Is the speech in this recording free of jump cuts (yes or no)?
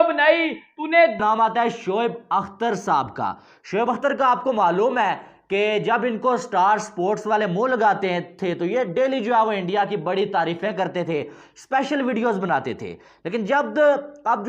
no